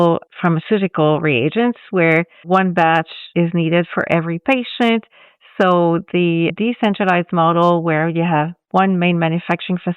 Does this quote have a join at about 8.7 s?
no; 1 cut; at 2.4 s

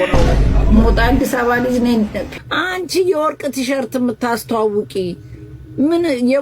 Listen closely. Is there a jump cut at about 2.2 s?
yes; 1 cut; at 2.2 s

